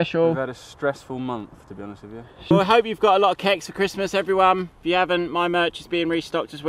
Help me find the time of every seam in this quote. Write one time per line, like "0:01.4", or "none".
0:02.5
0:04.7

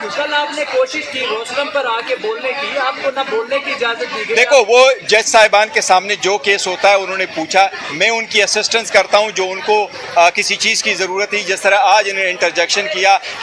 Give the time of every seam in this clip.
none

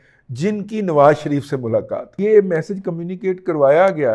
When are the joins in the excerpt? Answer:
0:02.2

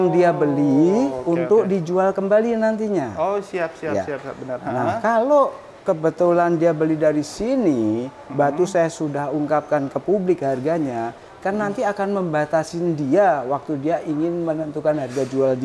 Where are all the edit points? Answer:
none

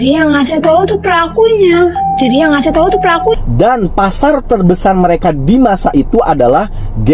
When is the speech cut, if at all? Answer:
0:03.4

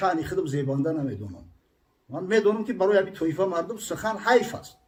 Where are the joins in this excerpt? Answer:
none

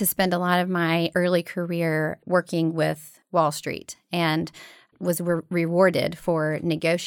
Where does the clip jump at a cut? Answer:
none

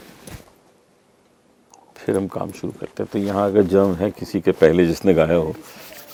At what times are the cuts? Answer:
none

